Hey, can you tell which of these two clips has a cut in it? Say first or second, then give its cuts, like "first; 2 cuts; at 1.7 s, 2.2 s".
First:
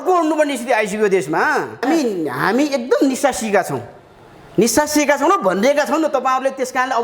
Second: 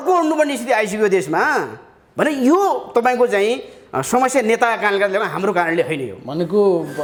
first; 1 cut; at 1.8 s